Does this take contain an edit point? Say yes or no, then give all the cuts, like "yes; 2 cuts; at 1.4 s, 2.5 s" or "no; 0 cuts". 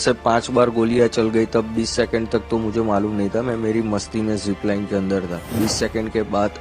yes; 1 cut; at 5.5 s